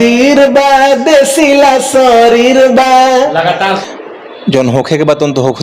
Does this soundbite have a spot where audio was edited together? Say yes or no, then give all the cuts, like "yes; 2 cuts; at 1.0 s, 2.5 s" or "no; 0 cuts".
yes; 1 cut; at 3.8 s